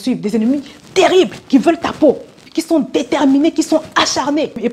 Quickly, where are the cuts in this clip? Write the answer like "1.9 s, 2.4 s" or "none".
2.5 s